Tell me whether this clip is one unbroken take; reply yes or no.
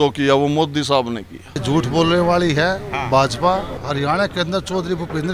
no